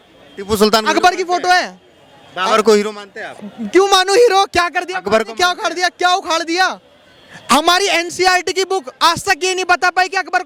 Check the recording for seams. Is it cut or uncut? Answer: uncut